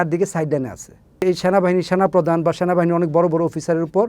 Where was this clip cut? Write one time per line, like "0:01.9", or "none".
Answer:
0:01.2